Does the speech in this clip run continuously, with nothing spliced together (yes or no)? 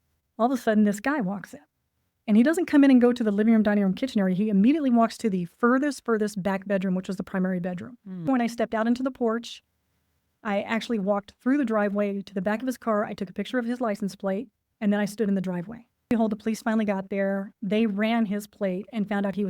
no